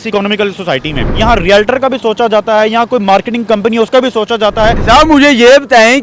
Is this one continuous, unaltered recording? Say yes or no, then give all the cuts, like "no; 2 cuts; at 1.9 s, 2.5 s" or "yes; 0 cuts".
no; 2 cuts; at 1.1 s, 4.8 s